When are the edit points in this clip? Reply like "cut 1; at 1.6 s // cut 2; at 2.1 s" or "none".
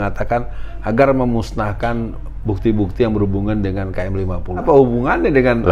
cut 1; at 4.6 s